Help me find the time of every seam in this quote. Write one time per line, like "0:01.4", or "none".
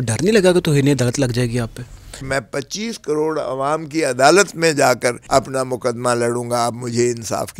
0:02.3
0:05.2